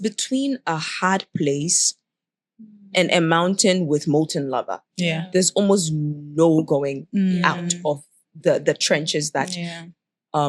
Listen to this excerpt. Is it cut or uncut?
uncut